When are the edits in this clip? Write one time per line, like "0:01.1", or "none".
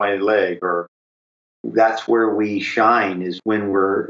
0:01.2

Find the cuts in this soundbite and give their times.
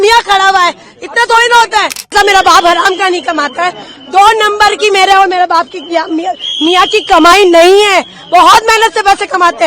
0:02.1

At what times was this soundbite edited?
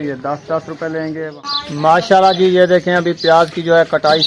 0:01.3

